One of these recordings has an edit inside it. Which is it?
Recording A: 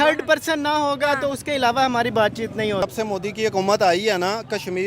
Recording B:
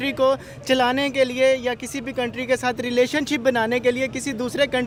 A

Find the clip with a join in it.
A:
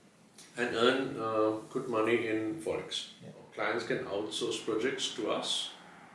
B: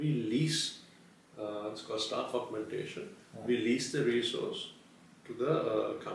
A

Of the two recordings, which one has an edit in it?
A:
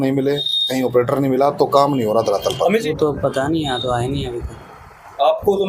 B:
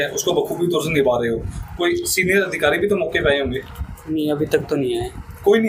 A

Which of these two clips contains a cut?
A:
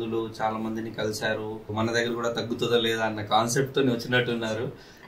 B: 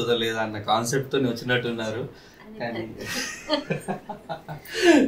A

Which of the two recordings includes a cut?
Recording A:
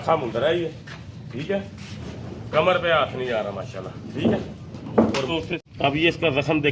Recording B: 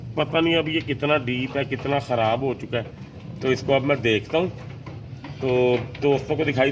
A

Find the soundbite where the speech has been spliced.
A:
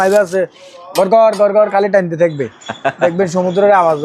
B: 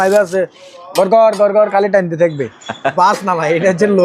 B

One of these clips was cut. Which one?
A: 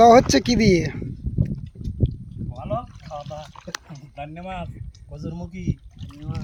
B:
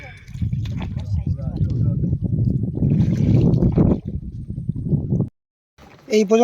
B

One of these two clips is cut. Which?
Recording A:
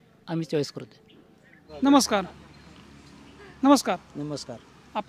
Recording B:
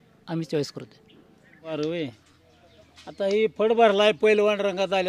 B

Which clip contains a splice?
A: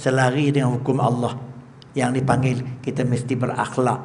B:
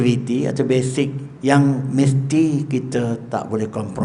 B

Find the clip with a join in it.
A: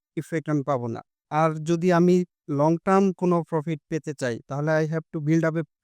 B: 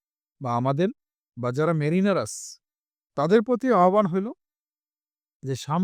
A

